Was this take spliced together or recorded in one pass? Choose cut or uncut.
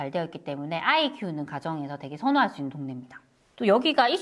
uncut